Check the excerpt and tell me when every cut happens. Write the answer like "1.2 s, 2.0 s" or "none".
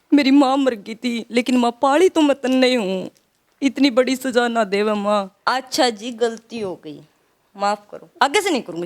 5.3 s